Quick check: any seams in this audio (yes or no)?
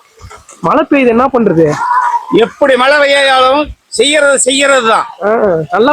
no